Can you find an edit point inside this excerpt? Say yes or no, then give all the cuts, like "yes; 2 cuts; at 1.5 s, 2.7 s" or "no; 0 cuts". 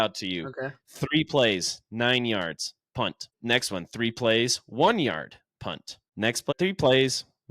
yes; 2 cuts; at 3.3 s, 6.5 s